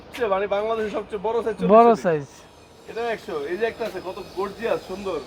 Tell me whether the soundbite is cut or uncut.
uncut